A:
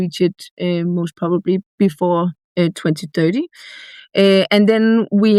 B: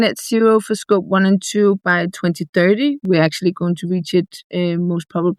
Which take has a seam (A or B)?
B